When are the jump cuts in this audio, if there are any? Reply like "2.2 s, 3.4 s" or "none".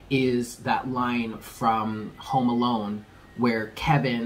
none